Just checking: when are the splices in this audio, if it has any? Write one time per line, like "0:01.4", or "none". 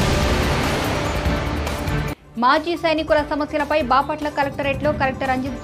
0:01.9

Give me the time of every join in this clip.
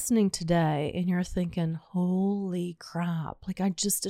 none

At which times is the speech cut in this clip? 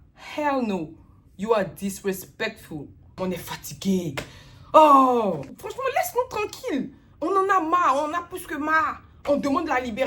0:03.1
0:05.7

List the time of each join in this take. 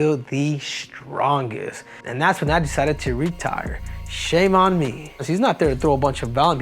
0:02.0
0:05.2

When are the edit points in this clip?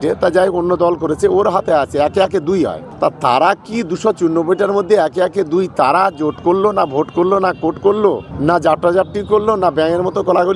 none

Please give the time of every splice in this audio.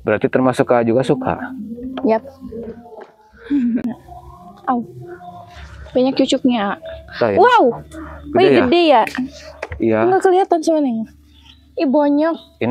0:03.8

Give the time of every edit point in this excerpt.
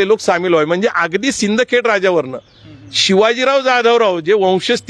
none

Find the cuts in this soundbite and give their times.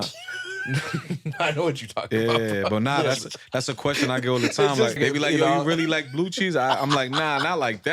0:05.0

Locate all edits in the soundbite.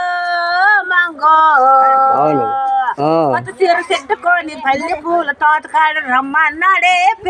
none

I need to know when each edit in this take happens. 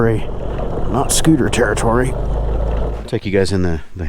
0:02.9

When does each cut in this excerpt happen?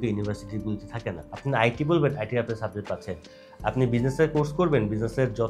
none

